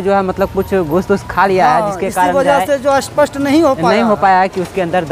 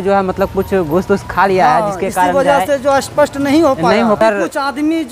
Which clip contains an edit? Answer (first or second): second